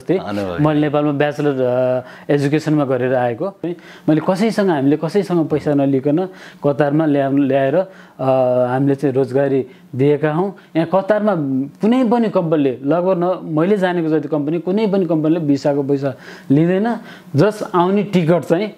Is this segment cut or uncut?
cut